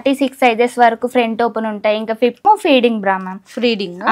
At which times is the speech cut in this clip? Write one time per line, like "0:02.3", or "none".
0:02.4